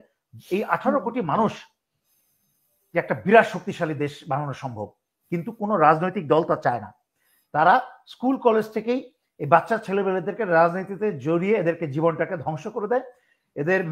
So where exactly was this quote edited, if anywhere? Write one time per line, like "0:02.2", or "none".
none